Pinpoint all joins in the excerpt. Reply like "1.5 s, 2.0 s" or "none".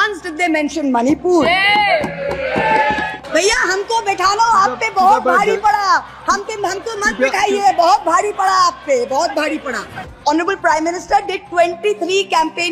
3.0 s, 10.1 s